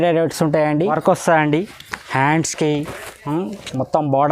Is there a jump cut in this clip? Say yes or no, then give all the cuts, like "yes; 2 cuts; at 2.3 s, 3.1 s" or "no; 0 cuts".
yes; 1 cut; at 1.0 s